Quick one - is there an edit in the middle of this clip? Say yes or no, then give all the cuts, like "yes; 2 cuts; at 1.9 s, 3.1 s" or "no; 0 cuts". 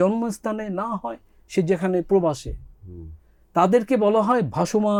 no; 0 cuts